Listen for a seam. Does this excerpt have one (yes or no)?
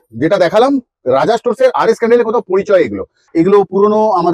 yes